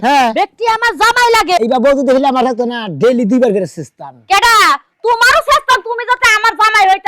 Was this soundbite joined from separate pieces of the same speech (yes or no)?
yes